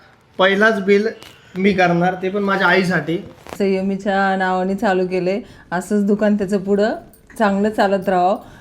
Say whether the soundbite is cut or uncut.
cut